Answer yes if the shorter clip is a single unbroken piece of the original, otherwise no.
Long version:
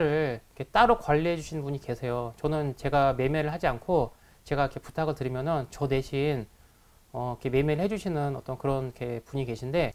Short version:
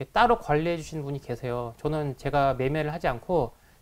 yes